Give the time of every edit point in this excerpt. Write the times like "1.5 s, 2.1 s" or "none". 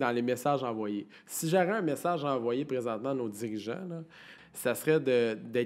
4.3 s